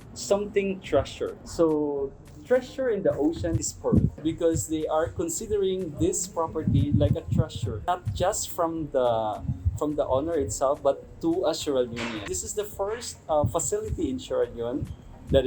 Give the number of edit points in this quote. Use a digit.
2